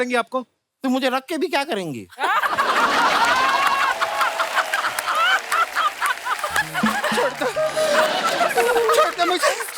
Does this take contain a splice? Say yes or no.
yes